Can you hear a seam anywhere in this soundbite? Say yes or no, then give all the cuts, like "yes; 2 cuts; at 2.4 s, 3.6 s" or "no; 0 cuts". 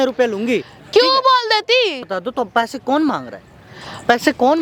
no; 0 cuts